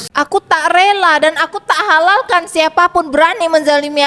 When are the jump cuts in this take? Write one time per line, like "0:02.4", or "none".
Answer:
none